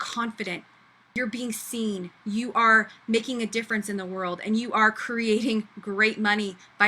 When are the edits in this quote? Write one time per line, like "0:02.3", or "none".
0:01.2